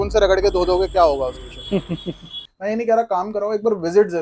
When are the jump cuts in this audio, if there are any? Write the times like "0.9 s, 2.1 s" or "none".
2.4 s